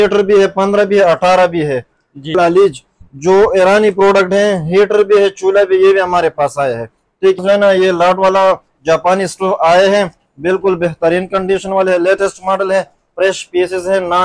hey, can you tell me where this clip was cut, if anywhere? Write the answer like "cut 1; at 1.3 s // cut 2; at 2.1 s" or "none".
cut 1; at 2.3 s // cut 2; at 7.4 s